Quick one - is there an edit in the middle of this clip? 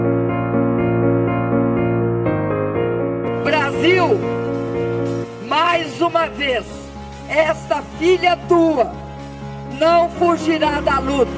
no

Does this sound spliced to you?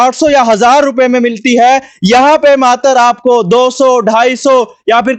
no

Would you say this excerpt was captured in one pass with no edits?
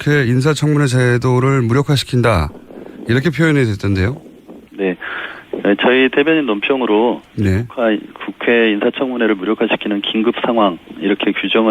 no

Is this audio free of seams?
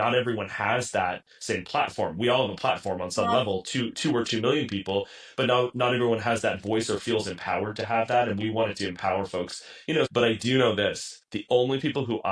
no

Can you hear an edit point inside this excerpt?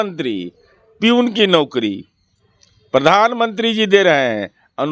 no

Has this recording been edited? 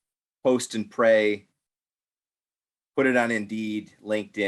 no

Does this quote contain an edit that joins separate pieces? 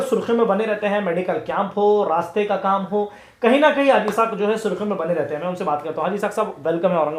no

